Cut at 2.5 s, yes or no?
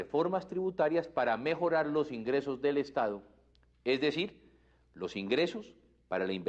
yes